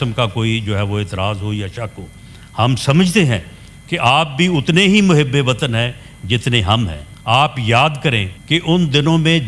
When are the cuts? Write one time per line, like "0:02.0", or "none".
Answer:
0:07.1
0:08.3